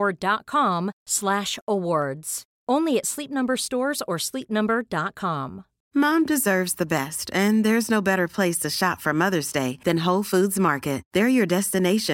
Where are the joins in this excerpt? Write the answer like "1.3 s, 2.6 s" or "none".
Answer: 5.7 s

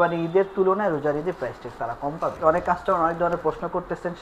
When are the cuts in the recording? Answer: 2.4 s

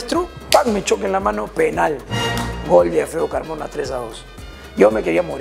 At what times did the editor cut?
none

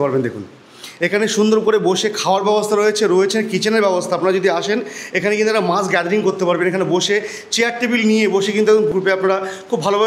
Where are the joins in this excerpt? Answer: 8.9 s

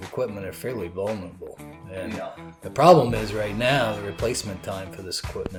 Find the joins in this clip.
none

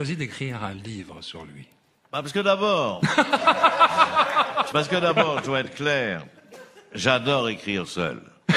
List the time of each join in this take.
5.3 s

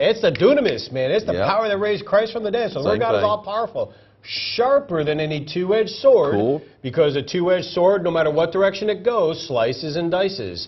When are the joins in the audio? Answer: 7.3 s

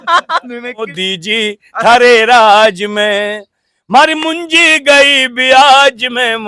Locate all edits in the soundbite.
0.9 s

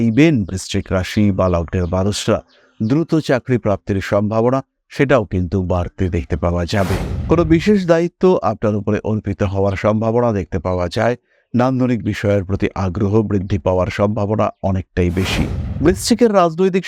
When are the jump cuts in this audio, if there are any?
7.1 s

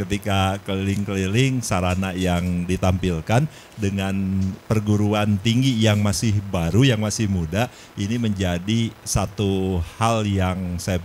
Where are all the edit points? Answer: none

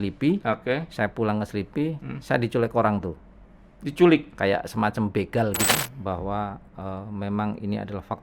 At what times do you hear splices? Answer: 5.6 s

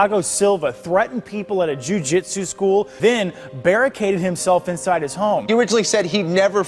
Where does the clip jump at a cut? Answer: 2.9 s, 5.4 s

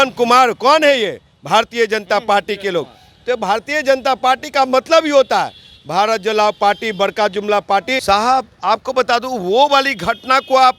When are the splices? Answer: 8.0 s

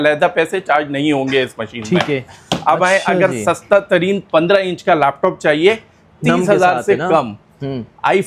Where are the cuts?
none

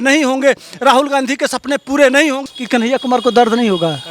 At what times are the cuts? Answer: 2.5 s

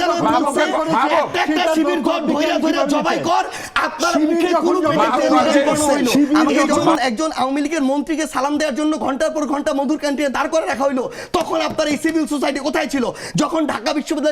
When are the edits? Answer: 7.0 s

